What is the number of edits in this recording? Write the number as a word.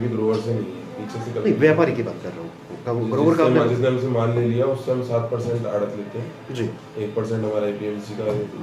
zero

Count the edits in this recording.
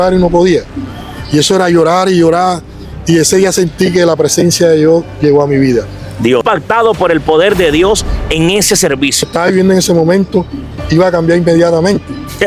two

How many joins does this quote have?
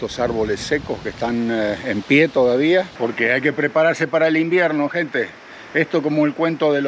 one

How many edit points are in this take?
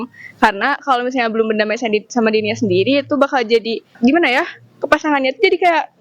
one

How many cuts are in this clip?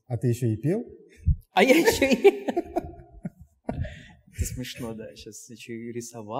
zero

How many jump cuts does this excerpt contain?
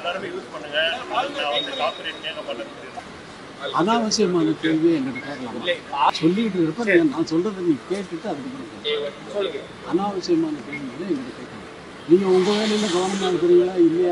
three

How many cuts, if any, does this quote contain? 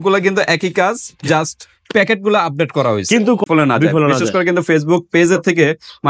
one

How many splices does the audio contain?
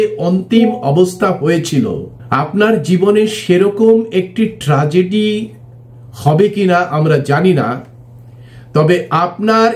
one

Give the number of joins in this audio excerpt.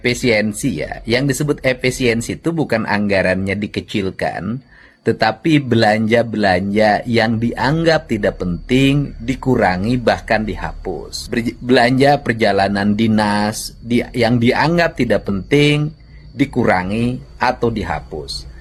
zero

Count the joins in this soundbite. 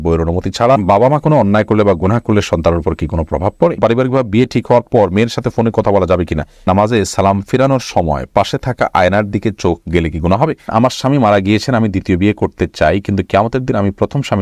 four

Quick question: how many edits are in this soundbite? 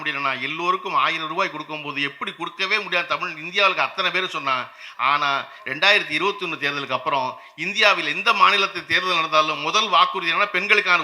zero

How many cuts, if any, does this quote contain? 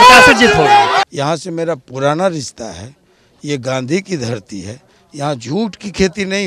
one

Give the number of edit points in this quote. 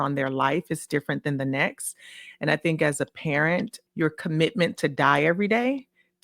one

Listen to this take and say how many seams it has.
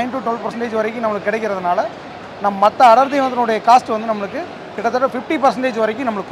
zero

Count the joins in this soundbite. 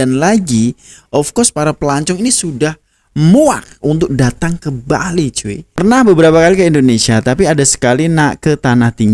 one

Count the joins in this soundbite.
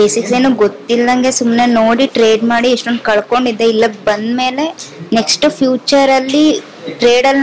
zero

